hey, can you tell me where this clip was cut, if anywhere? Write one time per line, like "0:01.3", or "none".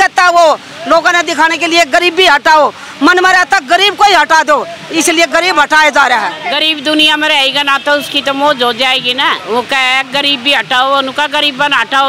0:06.4
0:09.4